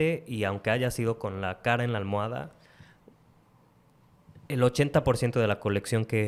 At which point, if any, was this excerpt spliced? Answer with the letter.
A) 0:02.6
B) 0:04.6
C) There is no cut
C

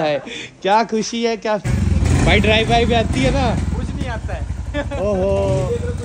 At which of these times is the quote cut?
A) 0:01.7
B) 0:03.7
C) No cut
A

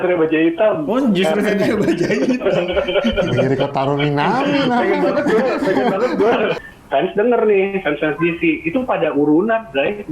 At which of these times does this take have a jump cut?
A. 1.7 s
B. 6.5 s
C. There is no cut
B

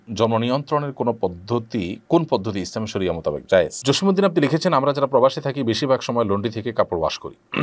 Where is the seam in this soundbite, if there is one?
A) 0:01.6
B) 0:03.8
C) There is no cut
B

